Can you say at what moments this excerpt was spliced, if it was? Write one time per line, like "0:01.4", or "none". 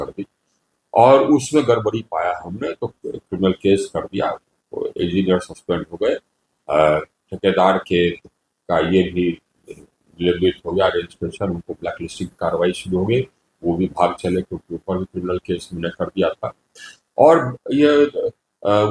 none